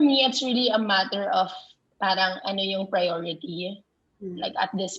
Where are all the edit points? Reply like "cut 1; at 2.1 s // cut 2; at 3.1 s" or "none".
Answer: none